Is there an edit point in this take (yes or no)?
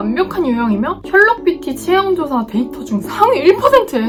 no